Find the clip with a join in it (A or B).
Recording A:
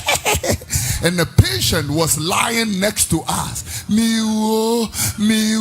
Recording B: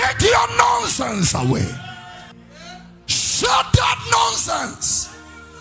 B